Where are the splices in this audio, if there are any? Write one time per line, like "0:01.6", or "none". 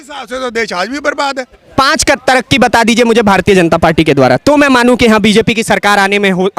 0:01.5